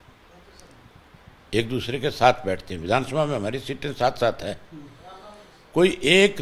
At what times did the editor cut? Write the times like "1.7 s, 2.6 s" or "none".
none